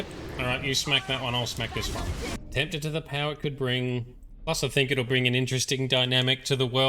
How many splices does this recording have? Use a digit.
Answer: 1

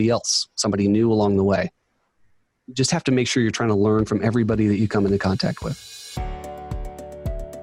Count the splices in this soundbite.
1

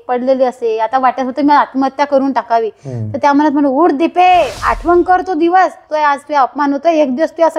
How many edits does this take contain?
2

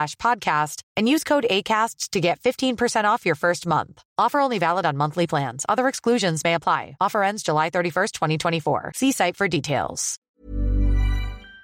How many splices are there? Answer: 1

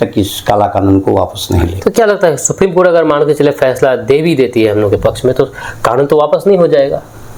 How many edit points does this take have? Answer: 0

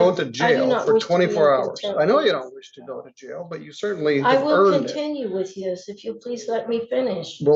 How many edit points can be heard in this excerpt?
0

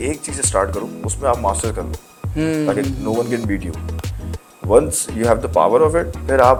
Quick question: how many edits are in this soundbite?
0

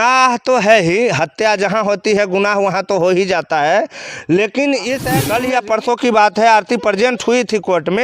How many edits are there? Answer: 1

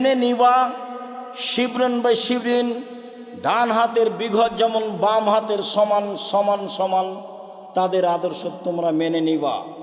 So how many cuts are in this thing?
0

